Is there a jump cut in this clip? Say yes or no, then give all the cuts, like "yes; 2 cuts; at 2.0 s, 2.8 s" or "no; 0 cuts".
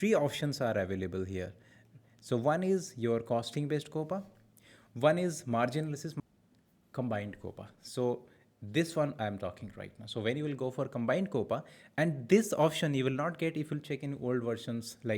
yes; 1 cut; at 6.1 s